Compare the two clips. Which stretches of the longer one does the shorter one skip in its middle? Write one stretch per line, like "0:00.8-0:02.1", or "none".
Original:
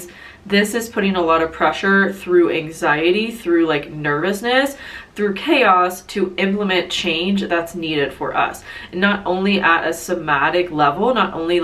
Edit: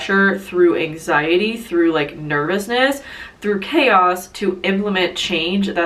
none